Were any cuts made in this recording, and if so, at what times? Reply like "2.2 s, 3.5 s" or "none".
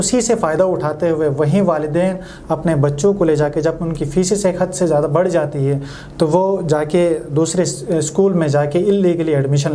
none